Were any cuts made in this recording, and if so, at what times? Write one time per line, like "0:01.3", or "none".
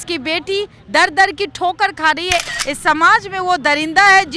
0:02.4